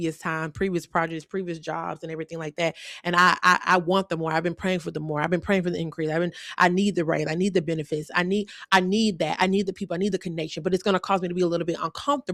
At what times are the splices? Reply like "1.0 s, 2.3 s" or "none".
none

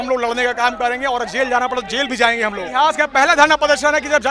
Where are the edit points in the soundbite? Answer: 2.7 s

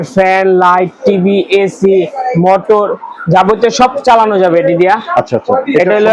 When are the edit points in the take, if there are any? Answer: none

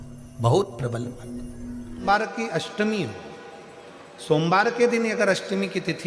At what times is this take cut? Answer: 2.0 s

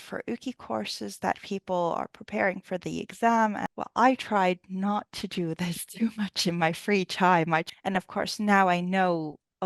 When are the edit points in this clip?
3.6 s, 7.7 s

